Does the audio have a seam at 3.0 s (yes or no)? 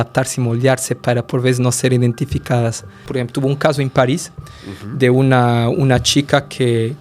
yes